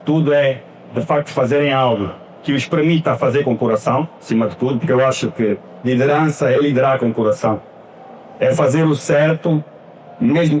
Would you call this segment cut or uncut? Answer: uncut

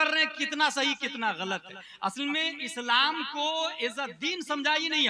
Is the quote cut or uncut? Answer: uncut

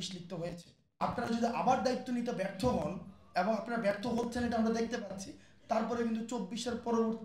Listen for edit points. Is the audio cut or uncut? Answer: cut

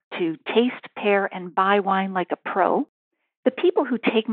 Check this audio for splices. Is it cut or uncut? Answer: cut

